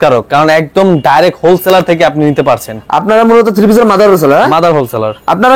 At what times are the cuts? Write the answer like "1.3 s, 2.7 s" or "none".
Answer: none